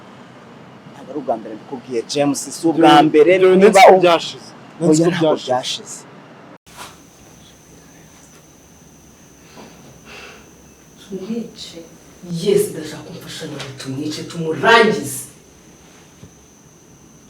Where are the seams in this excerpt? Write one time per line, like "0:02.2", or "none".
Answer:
0:06.7